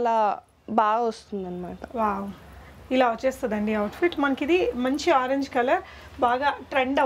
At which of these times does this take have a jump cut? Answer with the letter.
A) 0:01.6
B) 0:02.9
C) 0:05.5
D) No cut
D